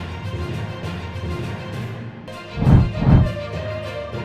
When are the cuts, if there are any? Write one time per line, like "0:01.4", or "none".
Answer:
0:01.2